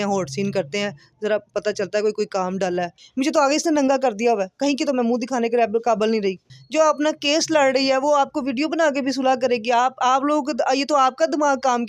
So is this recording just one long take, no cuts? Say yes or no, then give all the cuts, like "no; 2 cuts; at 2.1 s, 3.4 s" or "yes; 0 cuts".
no; 2 cuts; at 3.0 s, 6.4 s